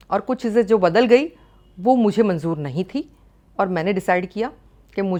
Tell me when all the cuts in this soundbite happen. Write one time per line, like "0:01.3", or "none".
none